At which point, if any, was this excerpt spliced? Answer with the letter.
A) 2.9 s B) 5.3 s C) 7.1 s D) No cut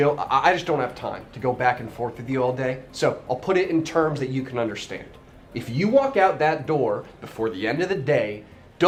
D